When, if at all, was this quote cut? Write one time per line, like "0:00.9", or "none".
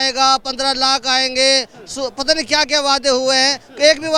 none